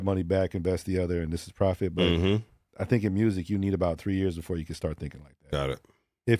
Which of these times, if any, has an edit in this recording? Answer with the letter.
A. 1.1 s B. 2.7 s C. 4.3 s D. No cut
B